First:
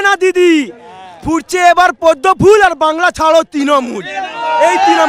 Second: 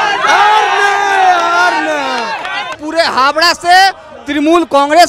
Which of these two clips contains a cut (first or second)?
second